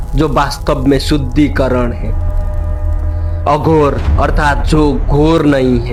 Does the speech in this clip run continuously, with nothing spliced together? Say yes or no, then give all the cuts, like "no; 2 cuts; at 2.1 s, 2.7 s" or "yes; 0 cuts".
yes; 0 cuts